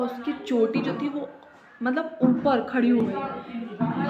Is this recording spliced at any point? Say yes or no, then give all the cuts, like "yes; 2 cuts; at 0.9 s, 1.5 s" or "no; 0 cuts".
no; 0 cuts